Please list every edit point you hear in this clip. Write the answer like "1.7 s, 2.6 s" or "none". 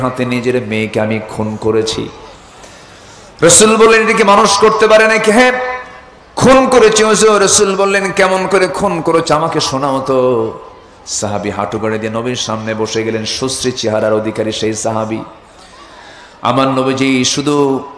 none